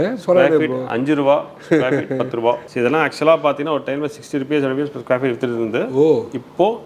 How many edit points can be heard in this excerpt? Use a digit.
1